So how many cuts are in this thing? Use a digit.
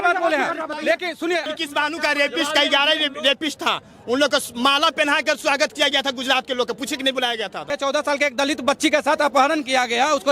2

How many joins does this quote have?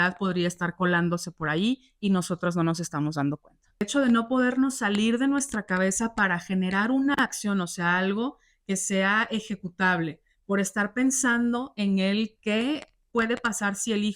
1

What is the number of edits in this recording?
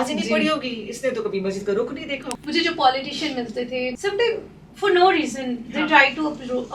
2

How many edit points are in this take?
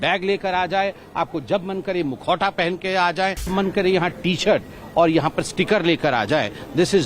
1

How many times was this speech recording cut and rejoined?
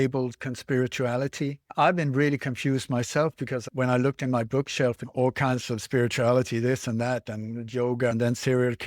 4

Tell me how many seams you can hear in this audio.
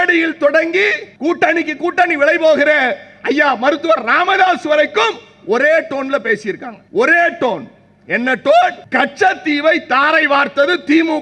3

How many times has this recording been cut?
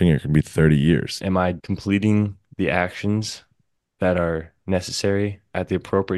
1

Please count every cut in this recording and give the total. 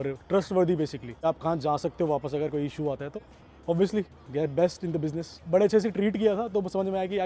4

